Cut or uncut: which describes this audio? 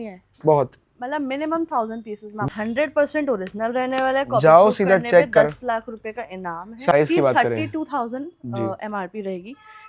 cut